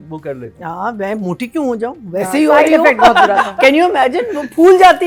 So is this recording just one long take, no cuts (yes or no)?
yes